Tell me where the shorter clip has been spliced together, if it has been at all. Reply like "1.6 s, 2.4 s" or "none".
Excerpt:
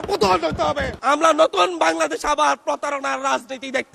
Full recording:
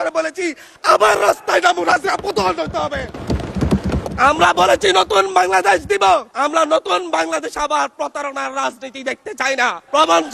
1.0 s